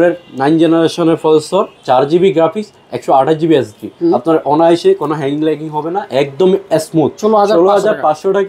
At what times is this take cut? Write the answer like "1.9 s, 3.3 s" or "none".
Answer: 1.8 s, 3.9 s, 7.2 s